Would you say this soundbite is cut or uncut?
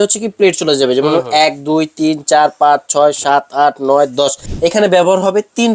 cut